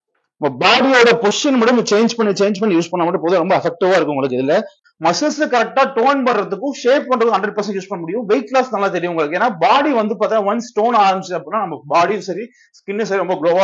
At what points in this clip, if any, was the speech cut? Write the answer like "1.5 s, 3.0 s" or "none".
4.8 s